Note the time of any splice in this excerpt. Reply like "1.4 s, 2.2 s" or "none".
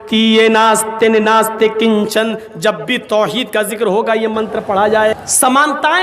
5.1 s